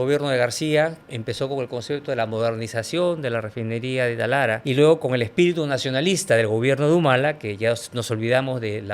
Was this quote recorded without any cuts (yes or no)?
no